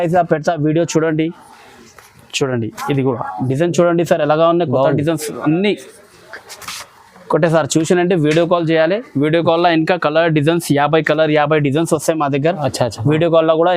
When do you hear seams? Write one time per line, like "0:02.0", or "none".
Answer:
none